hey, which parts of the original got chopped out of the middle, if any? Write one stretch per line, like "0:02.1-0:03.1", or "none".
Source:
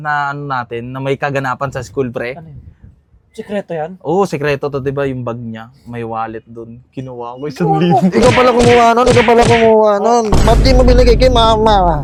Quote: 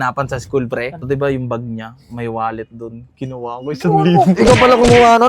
0:02.5-0:04.8